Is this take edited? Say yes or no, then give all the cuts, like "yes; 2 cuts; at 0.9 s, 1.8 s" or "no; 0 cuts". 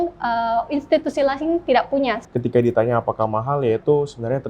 yes; 1 cut; at 2.2 s